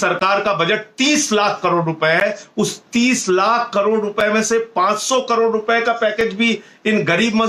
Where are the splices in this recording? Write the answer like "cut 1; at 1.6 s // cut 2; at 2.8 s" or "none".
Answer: none